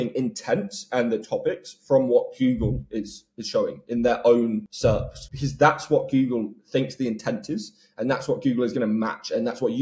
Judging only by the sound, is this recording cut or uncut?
cut